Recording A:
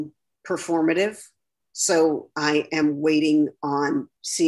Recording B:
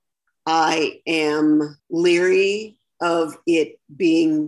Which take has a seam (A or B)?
B